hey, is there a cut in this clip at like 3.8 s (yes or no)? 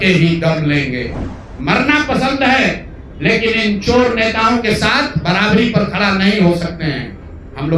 no